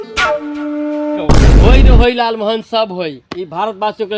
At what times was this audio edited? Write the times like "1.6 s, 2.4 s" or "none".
1.2 s